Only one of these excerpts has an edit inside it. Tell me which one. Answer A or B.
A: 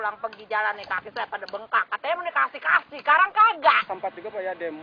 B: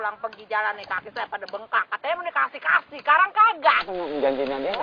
A